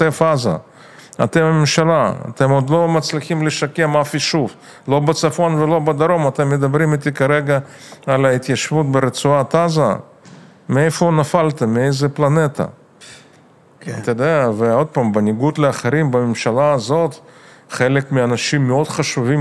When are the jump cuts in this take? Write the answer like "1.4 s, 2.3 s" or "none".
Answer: none